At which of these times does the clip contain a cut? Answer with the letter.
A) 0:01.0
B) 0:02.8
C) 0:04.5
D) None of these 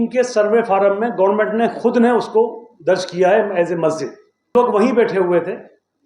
C